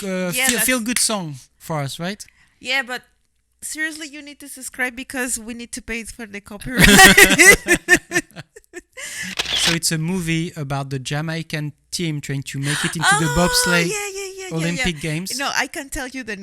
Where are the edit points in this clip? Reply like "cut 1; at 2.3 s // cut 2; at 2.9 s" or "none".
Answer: cut 1; at 9.4 s